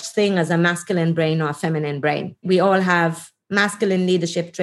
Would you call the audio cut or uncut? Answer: cut